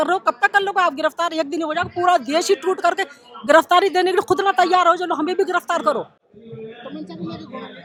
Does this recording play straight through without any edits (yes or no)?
yes